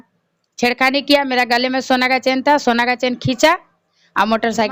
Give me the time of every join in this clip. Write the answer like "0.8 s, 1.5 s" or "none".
none